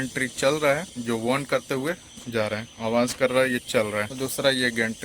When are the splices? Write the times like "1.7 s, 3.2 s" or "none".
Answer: 0.9 s, 2.7 s, 4.1 s